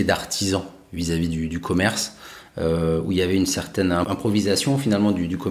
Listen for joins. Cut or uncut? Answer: uncut